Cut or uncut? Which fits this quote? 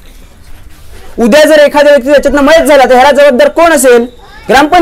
cut